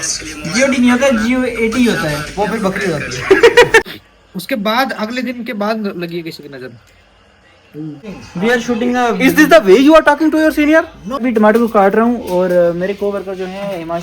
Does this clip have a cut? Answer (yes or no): yes